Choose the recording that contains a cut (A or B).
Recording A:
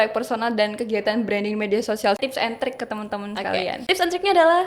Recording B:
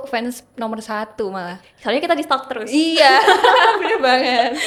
A